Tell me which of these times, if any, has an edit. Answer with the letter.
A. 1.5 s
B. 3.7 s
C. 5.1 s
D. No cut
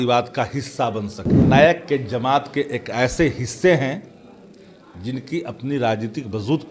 A